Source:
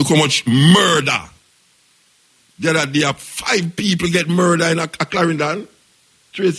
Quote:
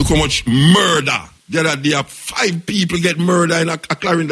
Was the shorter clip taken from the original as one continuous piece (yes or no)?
no